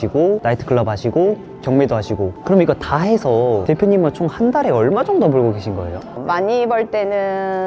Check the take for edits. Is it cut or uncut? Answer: uncut